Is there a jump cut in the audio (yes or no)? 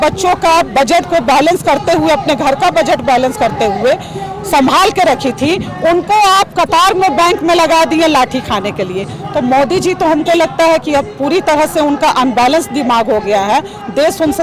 no